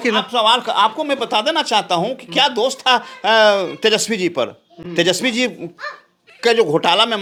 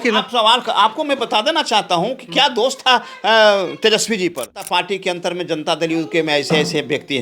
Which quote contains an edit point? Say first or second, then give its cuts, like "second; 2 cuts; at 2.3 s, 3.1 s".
second; 1 cut; at 4.7 s